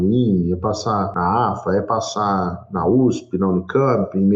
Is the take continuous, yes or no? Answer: no